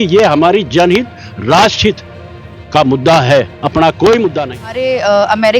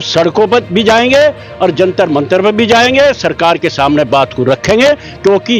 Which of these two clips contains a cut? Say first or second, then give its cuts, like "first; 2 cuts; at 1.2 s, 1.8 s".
first; 1 cut; at 4.5 s